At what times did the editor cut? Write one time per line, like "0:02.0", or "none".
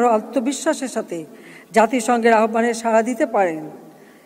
none